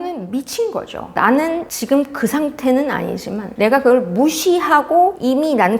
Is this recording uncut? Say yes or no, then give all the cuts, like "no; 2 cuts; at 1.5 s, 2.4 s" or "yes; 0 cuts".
no; 1 cut; at 1.0 s